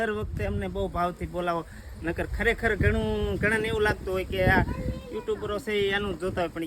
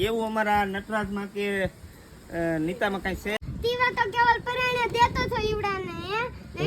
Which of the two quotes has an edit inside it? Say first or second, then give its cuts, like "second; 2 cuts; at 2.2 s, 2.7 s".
second; 1 cut; at 3.4 s